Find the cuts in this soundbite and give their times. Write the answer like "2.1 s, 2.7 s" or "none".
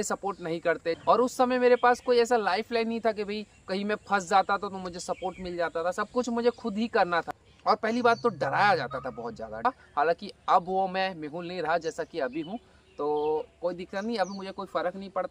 1.0 s, 7.3 s, 9.6 s